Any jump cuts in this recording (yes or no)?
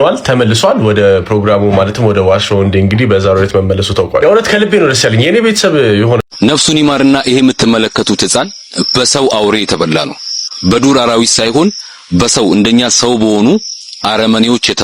yes